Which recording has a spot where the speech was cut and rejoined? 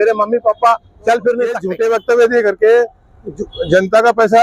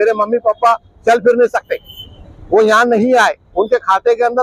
first; 1 cut; at 1.7 s

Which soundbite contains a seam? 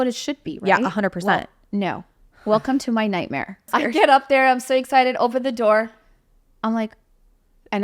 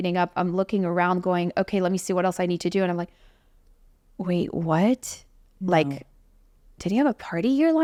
first; 1 cut; at 3.6 s

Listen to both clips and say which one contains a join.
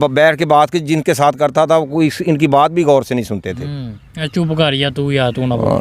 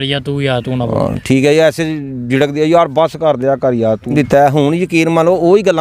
second; 1 cut; at 4.1 s

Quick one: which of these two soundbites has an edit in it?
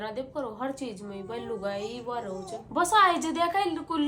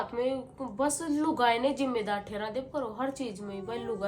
first; 1 cut; at 2.6 s

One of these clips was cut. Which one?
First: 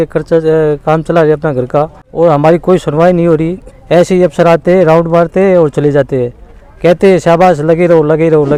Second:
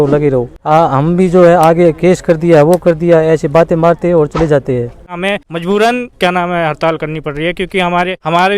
second; 1 cut; at 5.1 s

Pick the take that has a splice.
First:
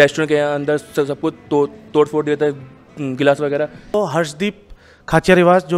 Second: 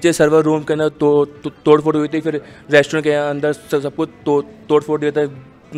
first; 1 cut; at 3.9 s

